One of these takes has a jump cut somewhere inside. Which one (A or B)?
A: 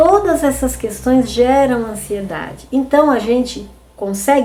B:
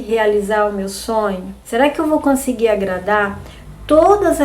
B